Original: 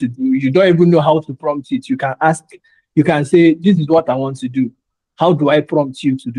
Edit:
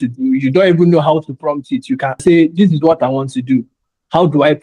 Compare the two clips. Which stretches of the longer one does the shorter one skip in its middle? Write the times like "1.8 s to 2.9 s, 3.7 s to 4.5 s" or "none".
2.2 s to 3.2 s